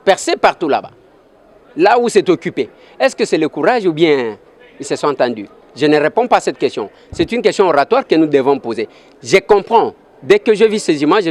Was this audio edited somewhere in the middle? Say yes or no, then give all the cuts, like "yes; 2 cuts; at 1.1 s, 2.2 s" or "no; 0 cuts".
no; 0 cuts